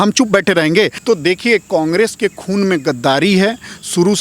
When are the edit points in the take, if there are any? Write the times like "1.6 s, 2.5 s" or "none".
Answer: 1.0 s